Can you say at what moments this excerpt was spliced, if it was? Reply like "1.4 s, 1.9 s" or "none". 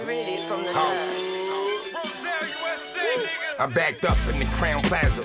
none